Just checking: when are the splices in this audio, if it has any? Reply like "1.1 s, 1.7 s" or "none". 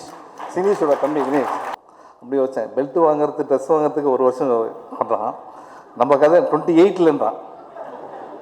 1.8 s